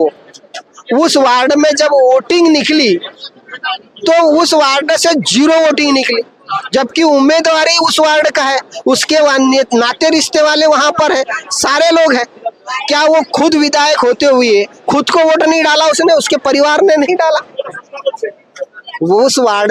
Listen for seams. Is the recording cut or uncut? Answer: uncut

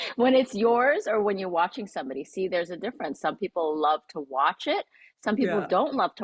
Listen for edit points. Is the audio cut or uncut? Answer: uncut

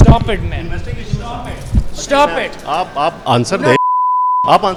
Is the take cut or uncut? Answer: uncut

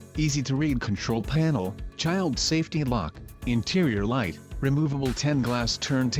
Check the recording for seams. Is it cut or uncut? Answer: cut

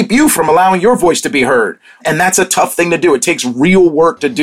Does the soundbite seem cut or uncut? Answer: uncut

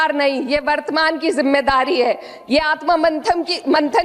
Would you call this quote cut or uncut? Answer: uncut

